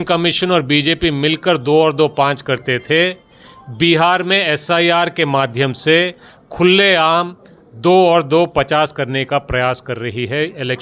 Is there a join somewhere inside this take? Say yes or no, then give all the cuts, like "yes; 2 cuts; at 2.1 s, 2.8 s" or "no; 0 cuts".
no; 0 cuts